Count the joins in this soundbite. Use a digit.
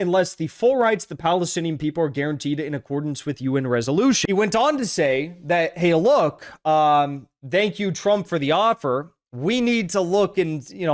1